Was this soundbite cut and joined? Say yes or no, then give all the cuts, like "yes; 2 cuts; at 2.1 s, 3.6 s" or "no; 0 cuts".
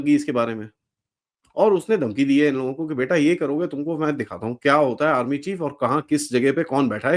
no; 0 cuts